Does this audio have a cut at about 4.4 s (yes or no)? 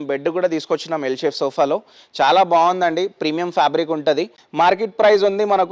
yes